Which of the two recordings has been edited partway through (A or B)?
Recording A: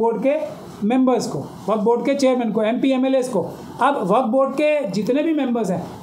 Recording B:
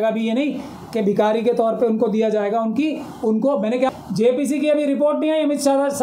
B